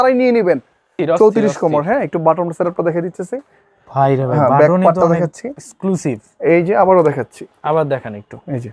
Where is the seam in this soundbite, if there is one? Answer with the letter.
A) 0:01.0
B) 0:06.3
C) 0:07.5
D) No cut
A